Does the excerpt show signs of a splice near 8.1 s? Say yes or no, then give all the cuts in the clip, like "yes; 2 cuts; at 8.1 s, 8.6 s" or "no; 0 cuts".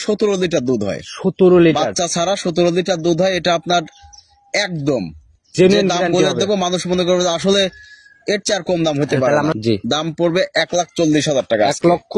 no; 1 cut; at 9.6 s